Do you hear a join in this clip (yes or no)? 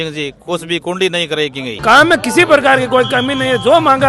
yes